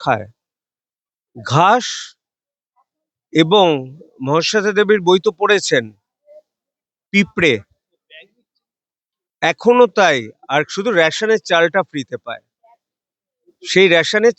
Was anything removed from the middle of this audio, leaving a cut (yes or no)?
no